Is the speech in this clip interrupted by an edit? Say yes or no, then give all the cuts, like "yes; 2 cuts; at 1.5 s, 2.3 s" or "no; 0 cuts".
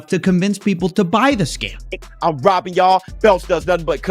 yes; 1 cut; at 2.0 s